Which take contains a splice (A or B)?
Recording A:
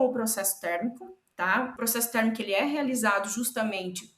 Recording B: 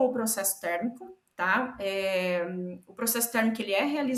A